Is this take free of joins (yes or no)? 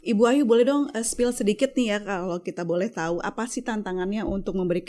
yes